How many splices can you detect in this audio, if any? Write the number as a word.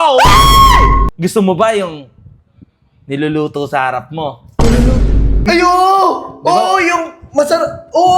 two